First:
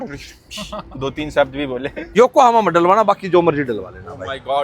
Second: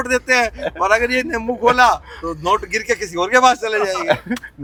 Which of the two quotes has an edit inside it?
first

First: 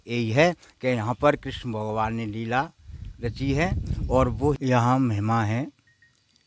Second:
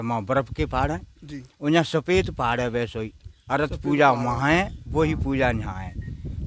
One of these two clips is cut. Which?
first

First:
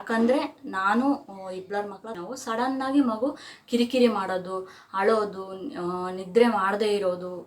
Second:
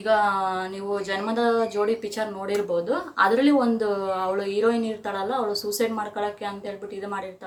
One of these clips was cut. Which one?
first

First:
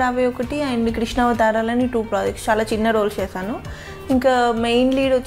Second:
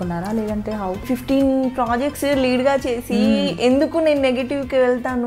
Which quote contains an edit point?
second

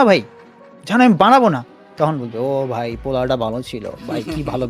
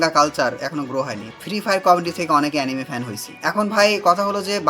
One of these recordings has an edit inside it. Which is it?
second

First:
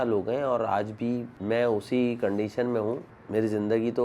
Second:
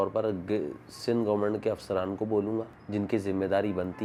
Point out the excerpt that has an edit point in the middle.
first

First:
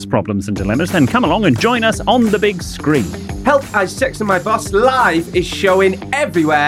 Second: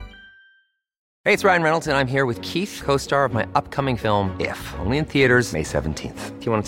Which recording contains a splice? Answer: second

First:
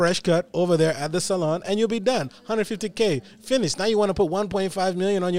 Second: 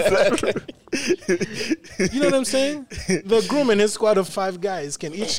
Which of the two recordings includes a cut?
second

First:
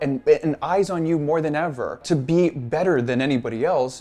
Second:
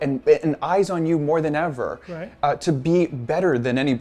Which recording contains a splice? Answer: first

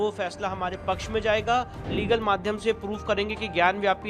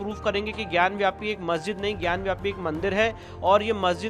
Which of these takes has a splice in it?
first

